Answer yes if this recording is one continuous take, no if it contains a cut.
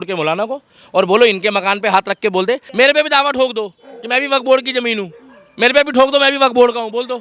no